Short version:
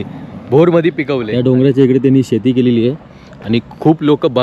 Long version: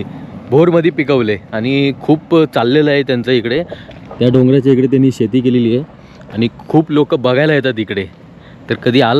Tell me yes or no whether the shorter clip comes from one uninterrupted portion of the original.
no